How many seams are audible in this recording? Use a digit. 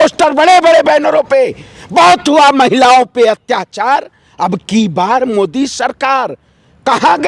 0